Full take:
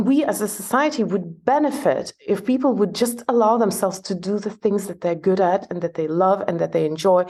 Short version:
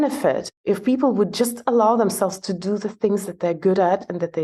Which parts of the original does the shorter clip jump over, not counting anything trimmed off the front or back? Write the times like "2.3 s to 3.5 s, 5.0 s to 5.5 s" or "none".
none